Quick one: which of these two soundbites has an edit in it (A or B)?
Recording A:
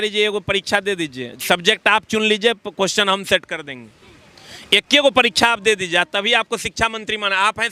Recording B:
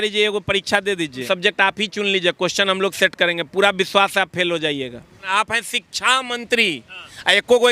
B